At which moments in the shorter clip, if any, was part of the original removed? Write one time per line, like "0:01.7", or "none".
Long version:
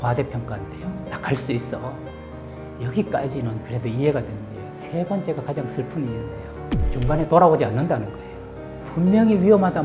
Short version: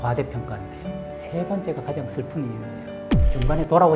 0:01.1